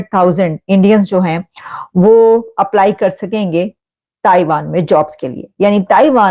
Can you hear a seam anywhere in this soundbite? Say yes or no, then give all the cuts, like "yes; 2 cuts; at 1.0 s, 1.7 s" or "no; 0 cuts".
no; 0 cuts